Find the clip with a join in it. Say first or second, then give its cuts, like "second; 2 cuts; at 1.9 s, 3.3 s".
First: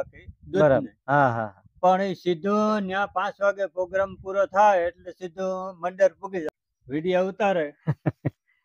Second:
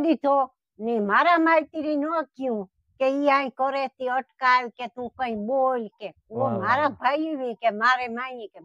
first; 1 cut; at 6.4 s